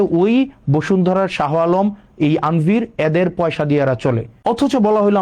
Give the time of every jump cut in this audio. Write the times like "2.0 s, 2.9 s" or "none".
4.3 s